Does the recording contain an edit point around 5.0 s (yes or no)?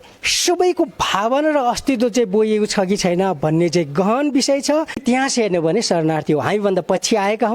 yes